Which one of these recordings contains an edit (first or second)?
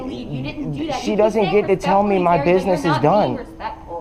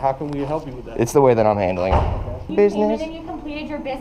second